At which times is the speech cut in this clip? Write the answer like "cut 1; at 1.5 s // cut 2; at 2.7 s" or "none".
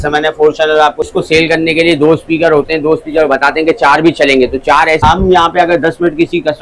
cut 1; at 1.1 s // cut 2; at 5.0 s